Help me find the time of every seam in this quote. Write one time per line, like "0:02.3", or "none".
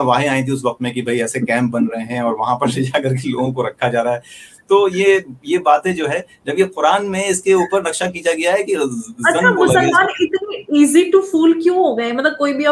none